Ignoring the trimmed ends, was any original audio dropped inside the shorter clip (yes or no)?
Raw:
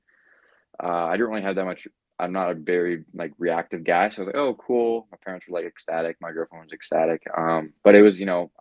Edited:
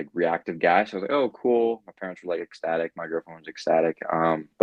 no